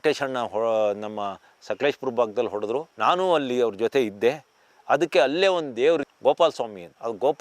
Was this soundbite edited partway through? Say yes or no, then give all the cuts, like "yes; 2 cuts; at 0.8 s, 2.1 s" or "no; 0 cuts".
yes; 2 cuts; at 2.9 s, 6.1 s